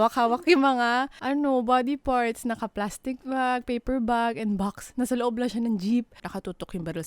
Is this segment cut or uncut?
cut